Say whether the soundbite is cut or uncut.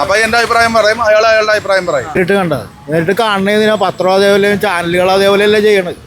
cut